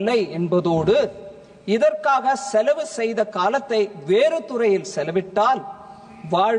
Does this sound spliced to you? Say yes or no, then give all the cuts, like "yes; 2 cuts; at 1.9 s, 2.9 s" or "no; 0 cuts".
no; 0 cuts